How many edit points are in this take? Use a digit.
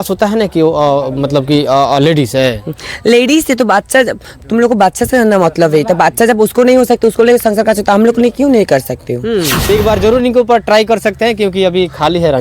1